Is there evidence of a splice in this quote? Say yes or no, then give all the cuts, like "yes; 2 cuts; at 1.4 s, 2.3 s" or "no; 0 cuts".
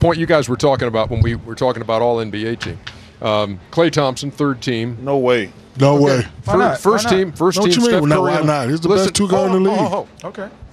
yes; 1 cut; at 7.0 s